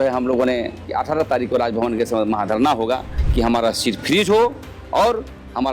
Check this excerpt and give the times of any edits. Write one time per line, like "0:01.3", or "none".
0:00.9
0:03.2